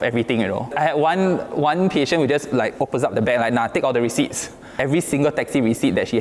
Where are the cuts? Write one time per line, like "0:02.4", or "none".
0:04.8